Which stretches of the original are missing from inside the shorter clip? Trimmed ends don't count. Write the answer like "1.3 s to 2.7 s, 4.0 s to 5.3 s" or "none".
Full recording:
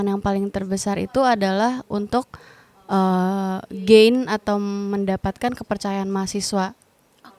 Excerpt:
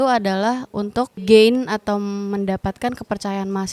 2.3 s to 3.8 s